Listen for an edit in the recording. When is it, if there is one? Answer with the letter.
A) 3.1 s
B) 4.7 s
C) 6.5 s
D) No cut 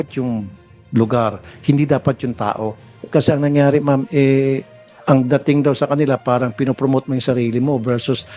A